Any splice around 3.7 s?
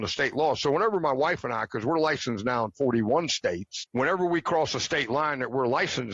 yes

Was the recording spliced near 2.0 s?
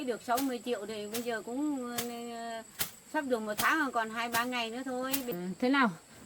no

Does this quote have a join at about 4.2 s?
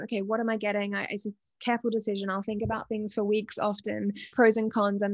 yes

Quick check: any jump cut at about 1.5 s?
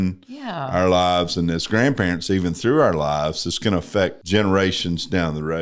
no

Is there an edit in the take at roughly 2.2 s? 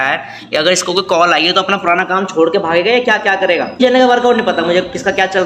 no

